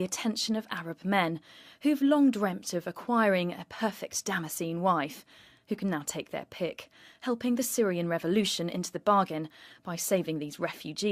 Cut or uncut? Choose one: uncut